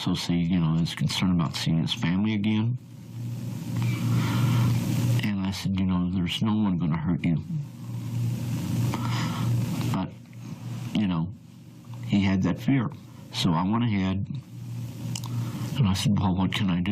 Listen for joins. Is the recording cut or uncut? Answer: cut